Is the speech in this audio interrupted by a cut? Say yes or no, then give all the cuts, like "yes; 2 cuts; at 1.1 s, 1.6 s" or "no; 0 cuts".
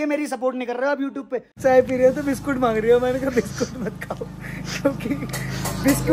yes; 1 cut; at 1.6 s